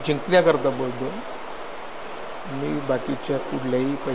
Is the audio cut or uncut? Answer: uncut